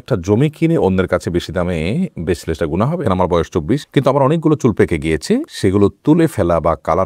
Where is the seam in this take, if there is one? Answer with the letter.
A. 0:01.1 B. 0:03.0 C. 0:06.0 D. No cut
B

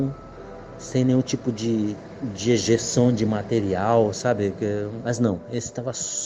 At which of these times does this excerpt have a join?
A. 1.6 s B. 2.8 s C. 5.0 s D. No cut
C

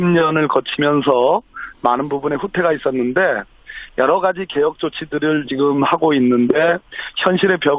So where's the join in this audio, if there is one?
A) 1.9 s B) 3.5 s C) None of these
A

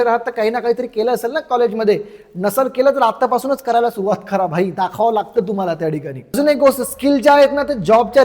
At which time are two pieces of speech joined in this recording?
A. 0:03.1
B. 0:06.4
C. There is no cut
B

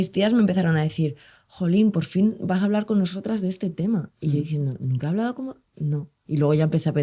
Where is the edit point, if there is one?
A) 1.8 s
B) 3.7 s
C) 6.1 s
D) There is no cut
C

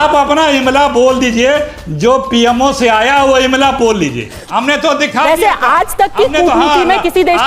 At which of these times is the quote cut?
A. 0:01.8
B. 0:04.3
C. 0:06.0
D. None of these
B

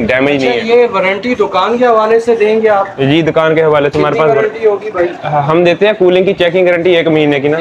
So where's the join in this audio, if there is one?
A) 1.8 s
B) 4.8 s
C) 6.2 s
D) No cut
D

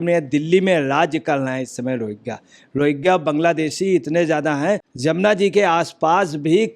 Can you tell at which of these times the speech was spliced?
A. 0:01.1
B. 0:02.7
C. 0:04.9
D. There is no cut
D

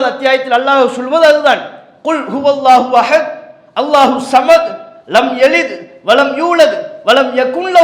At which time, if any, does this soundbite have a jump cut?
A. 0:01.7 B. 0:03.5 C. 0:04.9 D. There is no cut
D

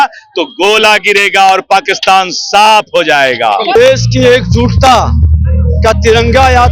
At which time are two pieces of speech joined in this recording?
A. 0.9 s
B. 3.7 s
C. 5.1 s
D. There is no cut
B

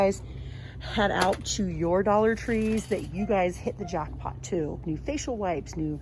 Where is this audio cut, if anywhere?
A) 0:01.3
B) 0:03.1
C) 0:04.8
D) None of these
C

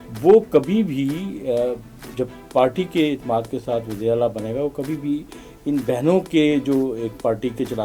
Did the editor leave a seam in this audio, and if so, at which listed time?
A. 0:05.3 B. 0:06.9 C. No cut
C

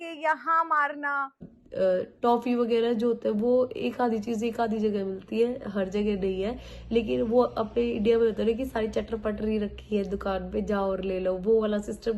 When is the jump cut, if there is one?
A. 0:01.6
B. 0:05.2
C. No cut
A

